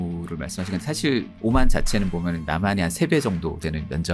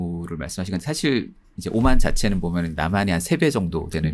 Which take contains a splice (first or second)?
first